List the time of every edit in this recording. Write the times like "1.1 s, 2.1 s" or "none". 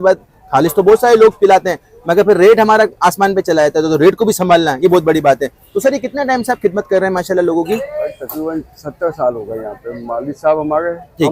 none